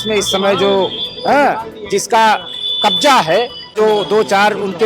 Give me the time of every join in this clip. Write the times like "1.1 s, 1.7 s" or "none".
3.8 s